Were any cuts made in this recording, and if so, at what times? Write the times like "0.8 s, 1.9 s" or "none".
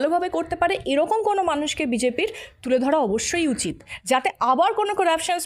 none